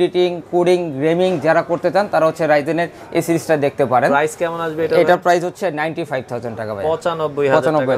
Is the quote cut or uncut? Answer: uncut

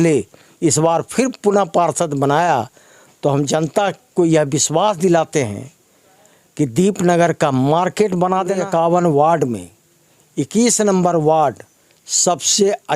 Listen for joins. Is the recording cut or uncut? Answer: cut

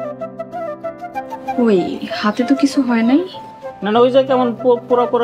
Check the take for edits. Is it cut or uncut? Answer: uncut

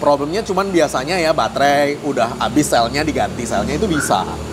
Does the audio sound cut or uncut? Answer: uncut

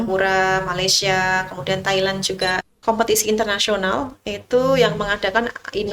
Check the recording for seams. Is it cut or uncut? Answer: cut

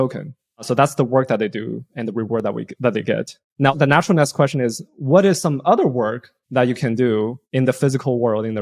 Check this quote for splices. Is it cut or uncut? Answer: cut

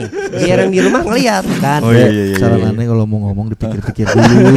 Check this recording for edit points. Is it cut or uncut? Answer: cut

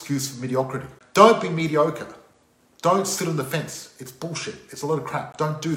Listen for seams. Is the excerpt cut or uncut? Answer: cut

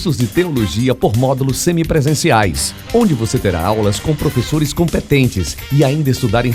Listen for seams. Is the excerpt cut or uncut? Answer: uncut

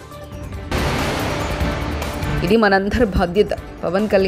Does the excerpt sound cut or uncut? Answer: uncut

